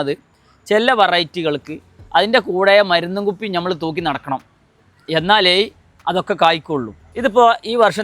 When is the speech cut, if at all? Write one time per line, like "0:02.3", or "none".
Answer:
0:07.0